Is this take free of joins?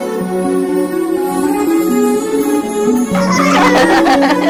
yes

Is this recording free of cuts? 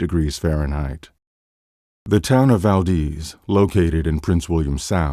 yes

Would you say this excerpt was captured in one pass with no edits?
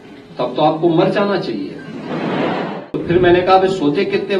no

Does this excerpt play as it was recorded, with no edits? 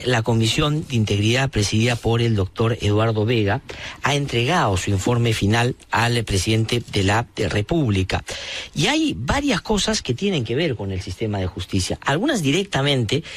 yes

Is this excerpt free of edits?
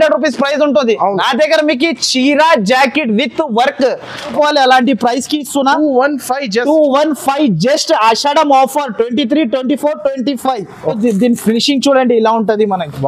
no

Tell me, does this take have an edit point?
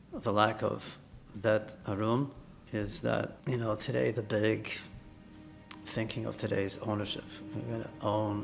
yes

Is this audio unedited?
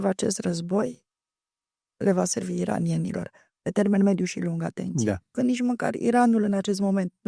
no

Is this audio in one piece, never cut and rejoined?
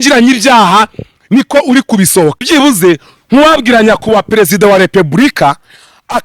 no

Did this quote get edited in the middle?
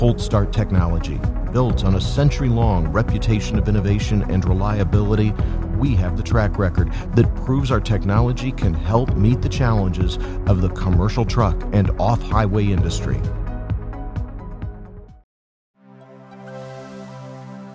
no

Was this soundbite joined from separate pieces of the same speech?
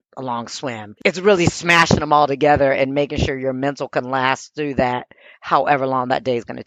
no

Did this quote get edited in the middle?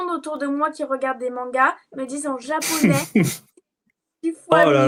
no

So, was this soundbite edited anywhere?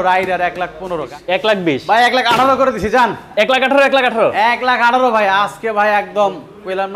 yes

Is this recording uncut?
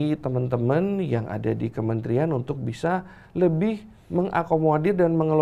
yes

